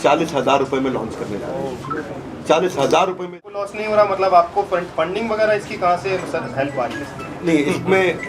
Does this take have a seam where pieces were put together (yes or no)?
yes